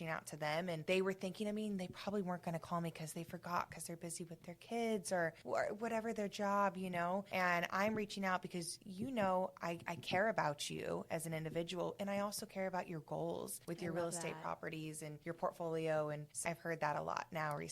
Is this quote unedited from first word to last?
no; 1 cut; at 16.4 s

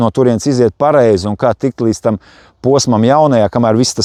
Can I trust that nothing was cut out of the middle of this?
yes; 0 cuts

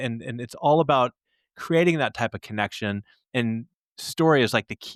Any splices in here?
no; 0 cuts

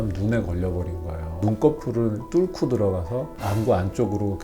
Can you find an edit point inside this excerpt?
yes; 2 cuts; at 1.4 s, 3.4 s

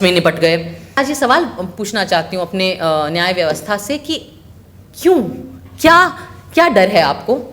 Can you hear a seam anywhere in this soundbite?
yes; 1 cut; at 1.0 s

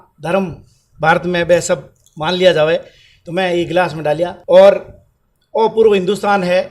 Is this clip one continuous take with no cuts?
no; 1 cut; at 4.4 s

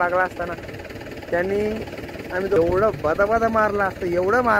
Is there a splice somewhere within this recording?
yes; 1 cut; at 2.6 s

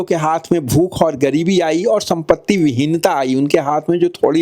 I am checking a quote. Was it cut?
no; 0 cuts

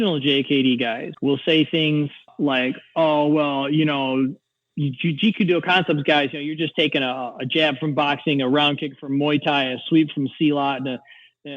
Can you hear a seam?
yes; 2 cuts; at 1.1 s, 2.3 s

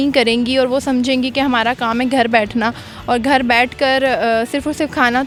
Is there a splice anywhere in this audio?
no; 0 cuts

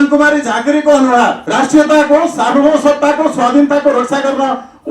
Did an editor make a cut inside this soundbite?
yes; 1 cut; at 1.4 s

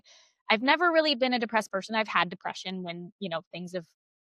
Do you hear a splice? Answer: no; 0 cuts

